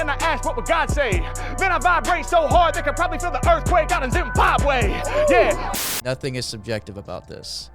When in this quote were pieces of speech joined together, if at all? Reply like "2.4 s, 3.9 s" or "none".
5.6 s